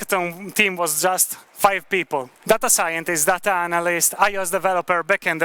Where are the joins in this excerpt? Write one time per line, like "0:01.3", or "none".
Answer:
0:02.3